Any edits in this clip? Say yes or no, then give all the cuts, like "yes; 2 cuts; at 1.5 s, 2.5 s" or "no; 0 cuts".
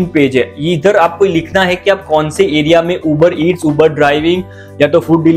no; 0 cuts